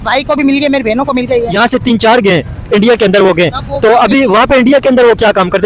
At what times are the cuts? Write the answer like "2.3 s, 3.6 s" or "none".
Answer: 1.5 s